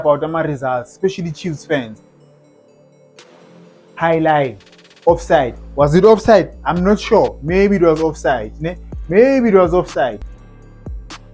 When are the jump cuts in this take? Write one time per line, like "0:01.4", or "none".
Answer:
0:10.4